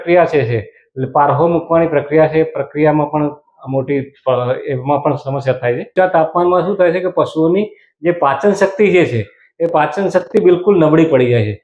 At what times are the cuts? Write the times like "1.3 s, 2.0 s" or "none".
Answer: 5.9 s